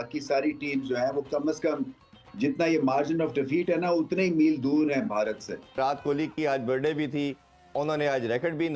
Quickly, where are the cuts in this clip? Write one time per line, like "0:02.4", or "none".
0:05.8